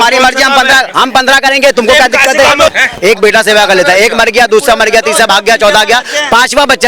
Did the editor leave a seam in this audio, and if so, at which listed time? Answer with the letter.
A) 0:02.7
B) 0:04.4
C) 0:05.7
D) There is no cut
A